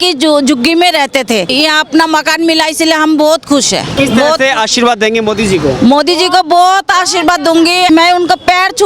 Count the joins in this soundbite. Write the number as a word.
three